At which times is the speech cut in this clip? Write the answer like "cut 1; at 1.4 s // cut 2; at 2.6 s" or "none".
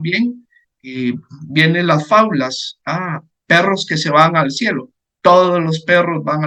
none